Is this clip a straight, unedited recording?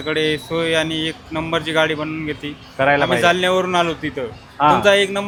yes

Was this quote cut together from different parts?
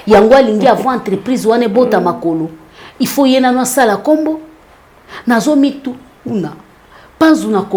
no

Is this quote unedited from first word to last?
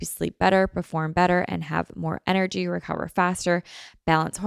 yes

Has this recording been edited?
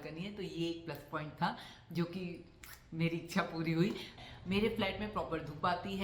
yes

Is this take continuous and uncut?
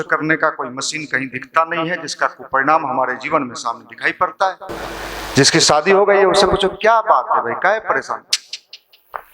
no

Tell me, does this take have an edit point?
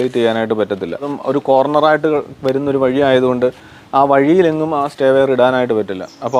yes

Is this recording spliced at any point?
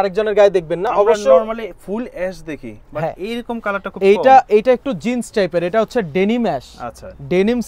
no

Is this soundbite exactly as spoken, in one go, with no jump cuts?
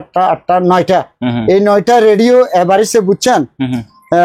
yes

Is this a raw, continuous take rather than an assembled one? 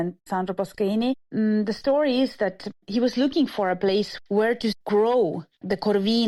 yes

